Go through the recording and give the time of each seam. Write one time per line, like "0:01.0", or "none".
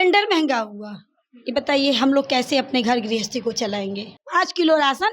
0:04.1